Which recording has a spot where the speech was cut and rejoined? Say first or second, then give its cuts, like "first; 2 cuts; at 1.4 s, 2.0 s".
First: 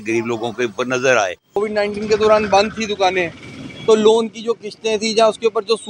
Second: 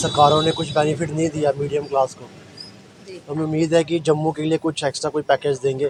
first; 1 cut; at 1.6 s